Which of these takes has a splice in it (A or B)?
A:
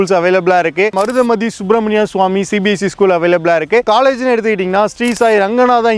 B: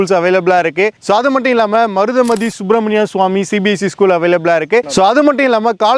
A